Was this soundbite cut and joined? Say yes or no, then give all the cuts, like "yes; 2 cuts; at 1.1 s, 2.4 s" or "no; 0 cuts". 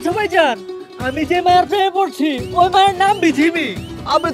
no; 0 cuts